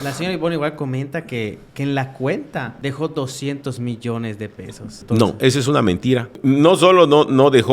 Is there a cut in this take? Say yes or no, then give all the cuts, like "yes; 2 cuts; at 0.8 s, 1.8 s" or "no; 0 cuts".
yes; 3 cuts; at 2.7 s, 4.9 s, 6.3 s